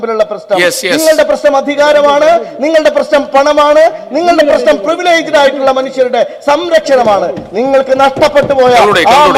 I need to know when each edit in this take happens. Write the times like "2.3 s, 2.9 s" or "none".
none